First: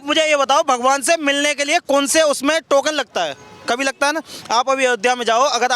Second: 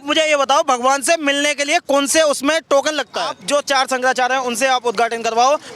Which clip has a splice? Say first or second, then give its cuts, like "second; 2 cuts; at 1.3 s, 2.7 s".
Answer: second; 1 cut; at 3.4 s